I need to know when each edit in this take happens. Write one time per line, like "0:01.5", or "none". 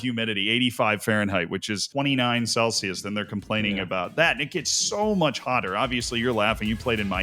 0:01.9